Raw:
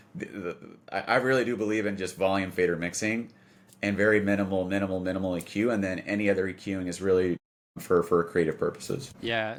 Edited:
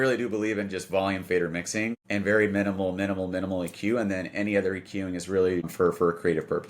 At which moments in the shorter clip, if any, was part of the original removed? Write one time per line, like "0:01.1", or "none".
0:02.0
0:05.7